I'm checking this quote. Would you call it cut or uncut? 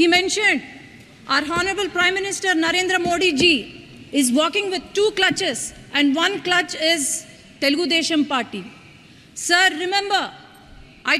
uncut